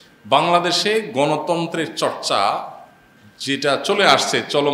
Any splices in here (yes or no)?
no